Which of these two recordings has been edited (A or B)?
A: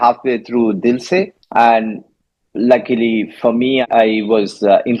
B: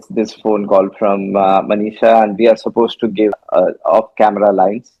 A